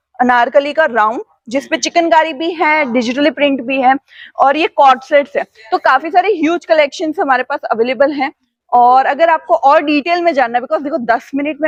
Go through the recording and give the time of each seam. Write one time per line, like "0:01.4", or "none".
none

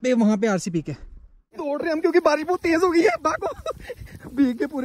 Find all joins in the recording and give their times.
0:01.7

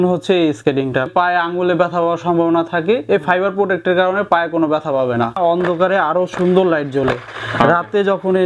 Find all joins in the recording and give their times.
0:01.1
0:05.4

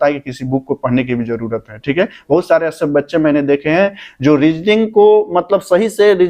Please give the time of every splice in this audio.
none

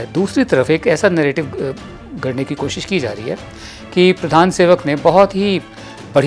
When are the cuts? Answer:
none

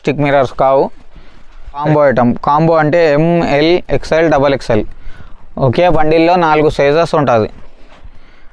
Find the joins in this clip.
0:01.8

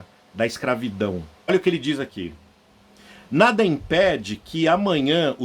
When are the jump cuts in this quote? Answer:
0:01.5

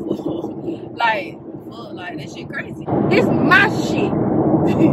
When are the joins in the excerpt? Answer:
0:02.8

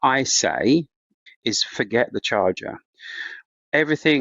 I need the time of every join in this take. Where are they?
0:01.2

